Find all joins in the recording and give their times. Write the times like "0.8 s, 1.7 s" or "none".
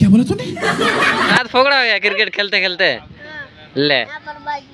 1.4 s